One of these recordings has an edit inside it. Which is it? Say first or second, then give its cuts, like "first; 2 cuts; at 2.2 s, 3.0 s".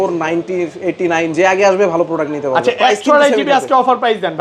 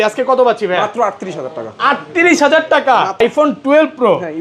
second; 1 cut; at 3.2 s